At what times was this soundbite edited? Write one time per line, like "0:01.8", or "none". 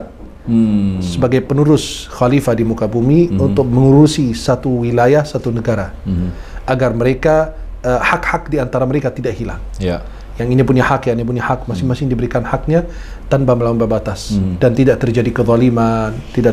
none